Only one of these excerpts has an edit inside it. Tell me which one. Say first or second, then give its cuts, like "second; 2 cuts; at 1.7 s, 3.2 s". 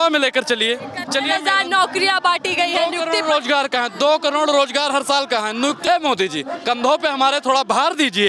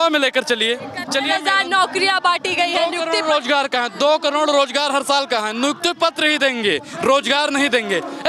first; 1 cut; at 5.8 s